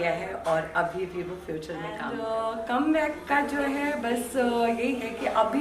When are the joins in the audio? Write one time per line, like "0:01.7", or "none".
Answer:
0:02.1